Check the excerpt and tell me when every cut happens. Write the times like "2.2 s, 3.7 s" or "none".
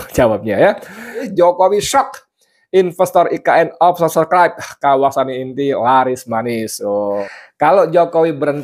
1.3 s, 7.2 s